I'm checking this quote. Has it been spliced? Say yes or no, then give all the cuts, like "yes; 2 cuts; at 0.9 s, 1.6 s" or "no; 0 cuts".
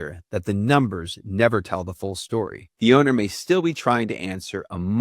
yes; 1 cut; at 2.6 s